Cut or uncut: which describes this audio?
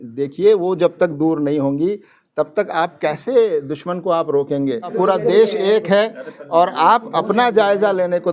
cut